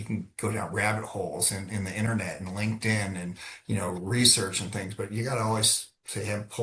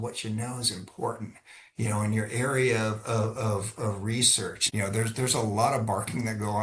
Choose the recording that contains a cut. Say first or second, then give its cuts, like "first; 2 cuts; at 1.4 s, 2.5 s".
second; 1 cut; at 4.6 s